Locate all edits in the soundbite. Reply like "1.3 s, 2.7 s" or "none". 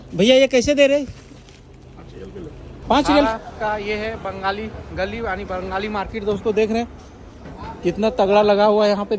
3.3 s